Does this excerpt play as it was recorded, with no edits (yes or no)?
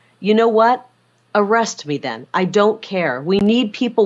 yes